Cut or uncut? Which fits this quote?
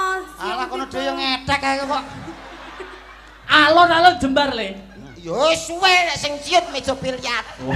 uncut